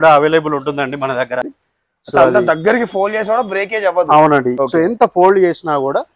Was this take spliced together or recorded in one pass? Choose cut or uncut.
cut